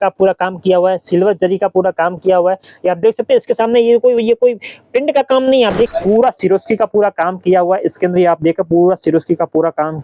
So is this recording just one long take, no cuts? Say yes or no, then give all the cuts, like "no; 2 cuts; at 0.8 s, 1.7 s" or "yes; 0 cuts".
no; 1 cut; at 5.9 s